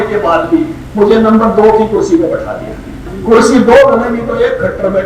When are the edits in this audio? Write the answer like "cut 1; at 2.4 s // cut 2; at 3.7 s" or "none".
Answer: cut 1; at 3.1 s